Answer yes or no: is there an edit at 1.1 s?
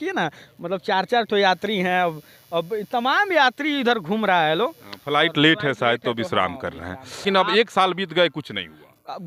no